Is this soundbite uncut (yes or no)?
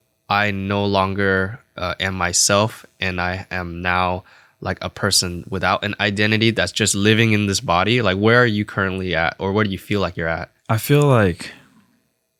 yes